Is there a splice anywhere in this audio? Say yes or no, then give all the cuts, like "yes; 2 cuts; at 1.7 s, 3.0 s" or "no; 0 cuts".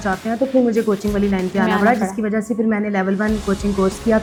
no; 0 cuts